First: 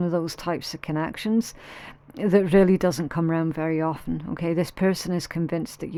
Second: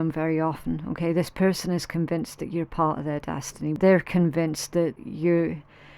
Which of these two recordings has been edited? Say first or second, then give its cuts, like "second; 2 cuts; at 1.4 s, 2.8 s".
second; 2 cuts; at 3.8 s, 5.0 s